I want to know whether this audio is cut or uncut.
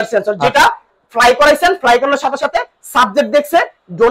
uncut